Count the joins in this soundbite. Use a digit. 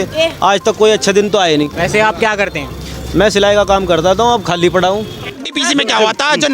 2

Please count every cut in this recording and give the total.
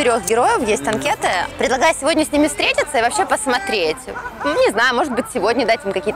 1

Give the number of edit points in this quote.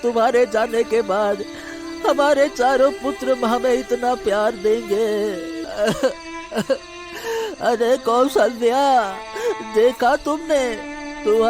1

